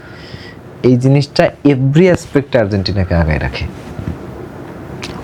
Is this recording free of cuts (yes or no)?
yes